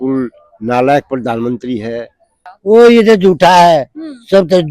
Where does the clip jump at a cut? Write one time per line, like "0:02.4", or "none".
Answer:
0:02.5